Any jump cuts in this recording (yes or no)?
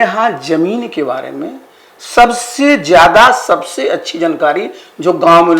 no